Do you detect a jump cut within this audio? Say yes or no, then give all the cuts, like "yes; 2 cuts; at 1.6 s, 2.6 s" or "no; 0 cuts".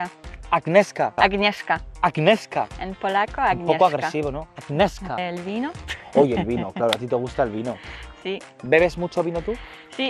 yes; 2 cuts; at 1.1 s, 5.2 s